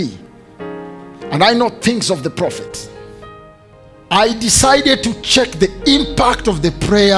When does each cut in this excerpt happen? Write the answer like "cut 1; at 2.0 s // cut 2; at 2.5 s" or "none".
cut 1; at 3.7 s